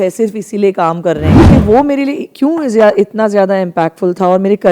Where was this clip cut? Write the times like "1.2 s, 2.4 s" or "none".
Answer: 1.4 s